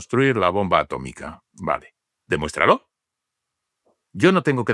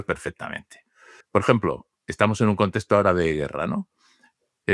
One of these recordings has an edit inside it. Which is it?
second; 1 cut; at 1.1 s

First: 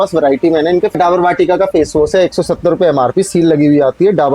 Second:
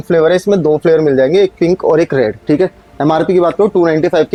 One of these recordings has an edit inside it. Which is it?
first; 1 cut; at 0.9 s

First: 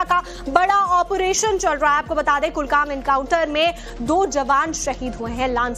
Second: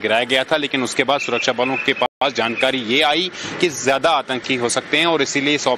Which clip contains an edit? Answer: first; 1 cut; at 1.4 s

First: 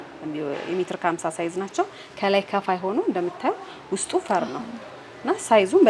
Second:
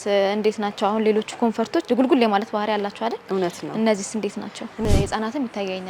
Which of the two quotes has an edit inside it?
second; 2 cuts; at 1.8 s, 4.8 s

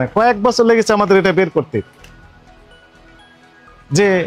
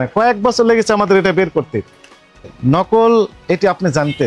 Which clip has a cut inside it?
second; 1 cut; at 2.5 s

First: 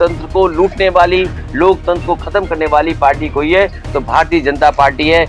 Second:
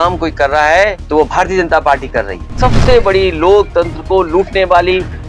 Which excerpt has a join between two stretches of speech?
second; 2 cuts; at 1.0 s, 2.5 s

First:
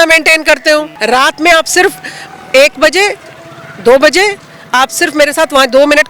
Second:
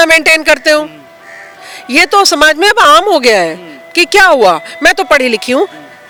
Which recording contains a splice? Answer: first; 1 cut; at 0.9 s

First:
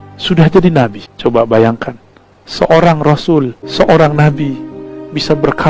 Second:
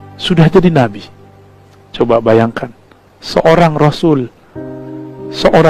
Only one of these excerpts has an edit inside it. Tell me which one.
first; 2 cuts; at 1.0 s, 3.6 s

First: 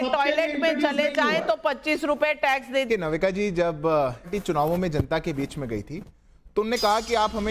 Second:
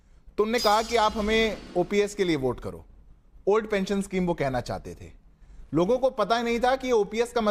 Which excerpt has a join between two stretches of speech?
first; 2 cuts; at 2.9 s, 4.3 s

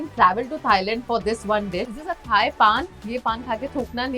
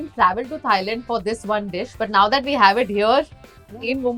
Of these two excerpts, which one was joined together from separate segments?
first; 2 cuts; at 1.9 s, 2.9 s

